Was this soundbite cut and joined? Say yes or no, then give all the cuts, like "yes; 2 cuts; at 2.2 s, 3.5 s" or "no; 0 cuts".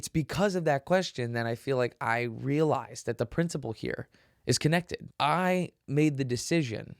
yes; 1 cut; at 5.1 s